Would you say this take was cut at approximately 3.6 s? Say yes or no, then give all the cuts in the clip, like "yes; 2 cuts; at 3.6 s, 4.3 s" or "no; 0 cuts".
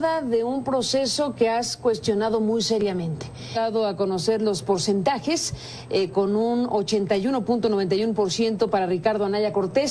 no; 0 cuts